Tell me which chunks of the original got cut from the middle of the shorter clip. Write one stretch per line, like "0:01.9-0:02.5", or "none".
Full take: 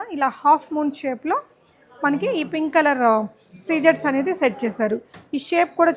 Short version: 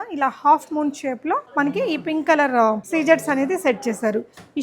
0:01.5-0:01.9
0:03.3-0:03.6